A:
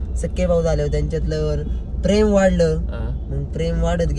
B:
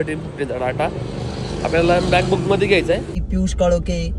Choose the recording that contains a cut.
B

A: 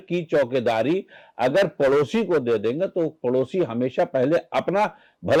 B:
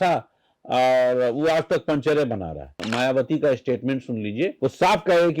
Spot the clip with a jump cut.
B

